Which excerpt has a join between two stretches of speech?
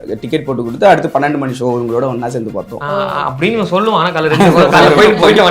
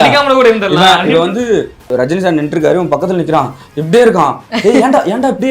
second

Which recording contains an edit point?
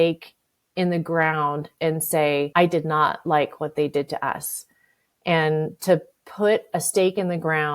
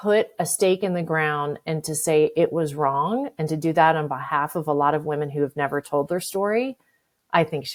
first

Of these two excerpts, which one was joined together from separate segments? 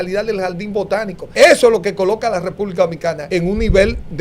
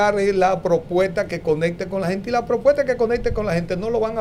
first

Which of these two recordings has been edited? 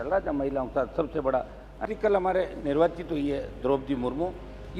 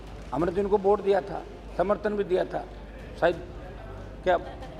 first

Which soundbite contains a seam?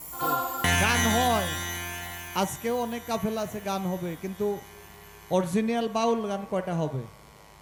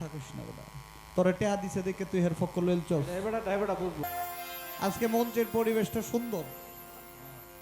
second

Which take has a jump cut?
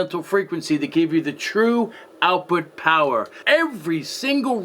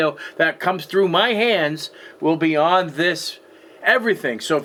first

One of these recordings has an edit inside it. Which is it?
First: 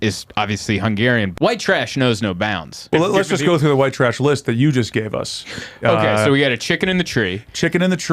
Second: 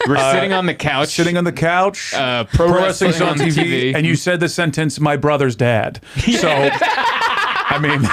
first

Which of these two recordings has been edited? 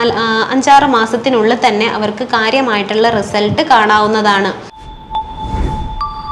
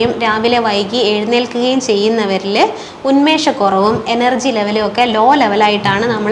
first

